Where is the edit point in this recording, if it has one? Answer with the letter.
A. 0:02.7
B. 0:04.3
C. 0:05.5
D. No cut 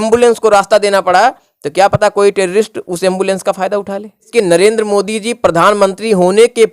B